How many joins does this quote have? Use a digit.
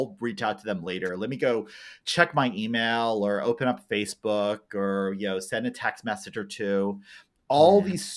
0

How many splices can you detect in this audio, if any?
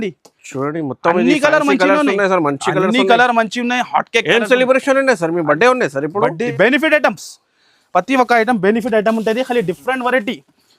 1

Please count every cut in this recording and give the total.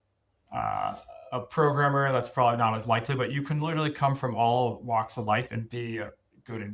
0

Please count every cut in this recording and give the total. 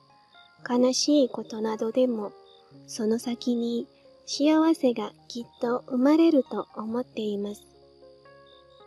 1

